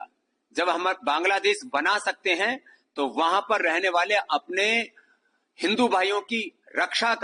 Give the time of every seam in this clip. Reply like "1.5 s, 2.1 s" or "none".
none